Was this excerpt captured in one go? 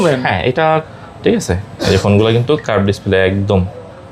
no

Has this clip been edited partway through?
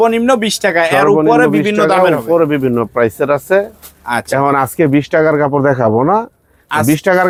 no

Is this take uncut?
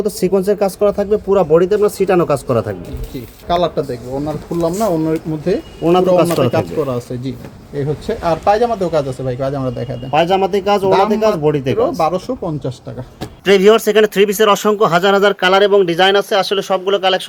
yes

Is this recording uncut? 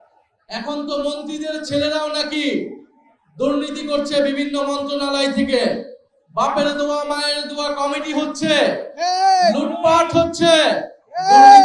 yes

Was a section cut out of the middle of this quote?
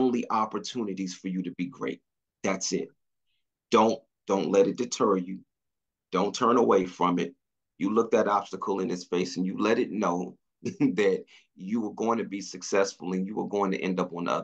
no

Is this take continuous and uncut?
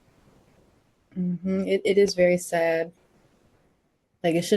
no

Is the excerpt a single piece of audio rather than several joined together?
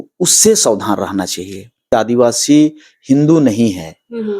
no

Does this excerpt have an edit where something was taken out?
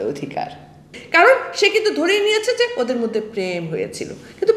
yes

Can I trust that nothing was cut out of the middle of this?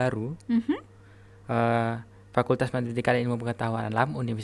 yes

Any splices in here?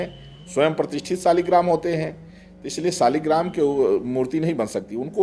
no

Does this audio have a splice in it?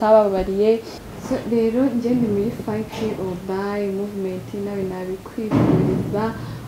yes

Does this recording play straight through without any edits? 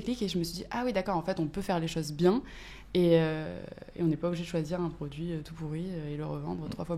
yes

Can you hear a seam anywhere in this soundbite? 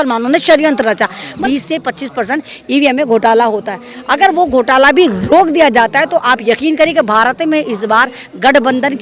yes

